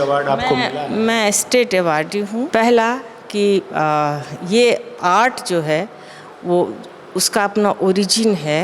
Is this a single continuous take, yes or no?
no